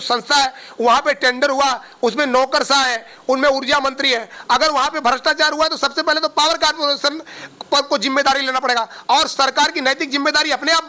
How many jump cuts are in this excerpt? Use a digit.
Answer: 0